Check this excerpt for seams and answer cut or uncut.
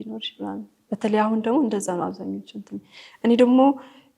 uncut